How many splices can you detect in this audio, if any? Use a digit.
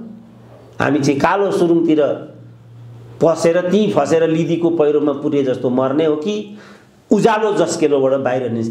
0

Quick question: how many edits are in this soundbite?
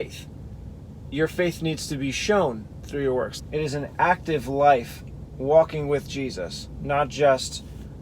1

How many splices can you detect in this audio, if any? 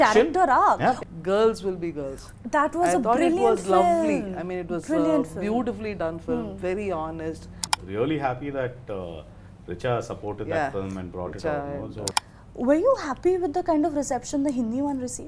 3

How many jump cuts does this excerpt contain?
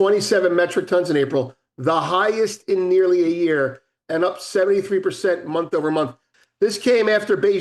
1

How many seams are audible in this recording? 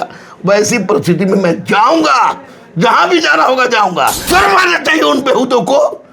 1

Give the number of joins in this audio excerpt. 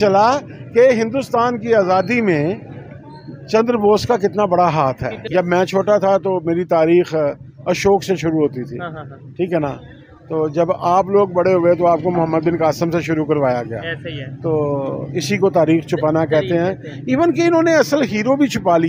1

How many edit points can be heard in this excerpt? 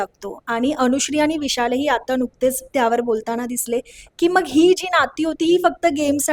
0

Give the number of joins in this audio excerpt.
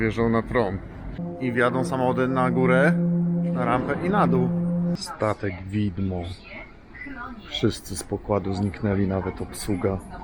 2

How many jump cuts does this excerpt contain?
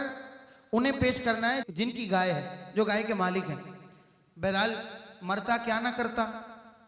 1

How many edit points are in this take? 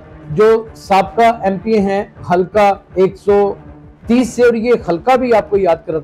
0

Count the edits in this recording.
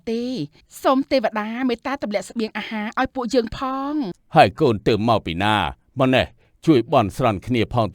1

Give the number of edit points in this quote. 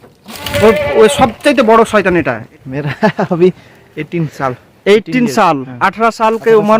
1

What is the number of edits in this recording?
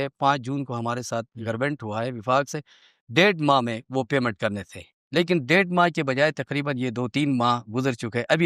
0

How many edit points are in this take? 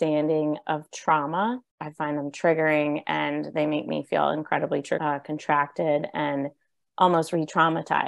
2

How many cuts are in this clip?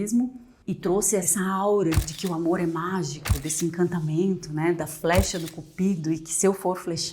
2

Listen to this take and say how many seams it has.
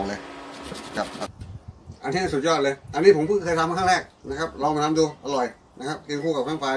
1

